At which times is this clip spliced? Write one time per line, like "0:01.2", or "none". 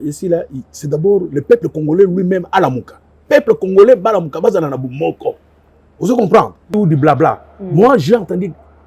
0:06.7